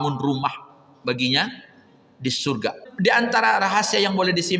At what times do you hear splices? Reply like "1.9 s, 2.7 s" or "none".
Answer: 2.8 s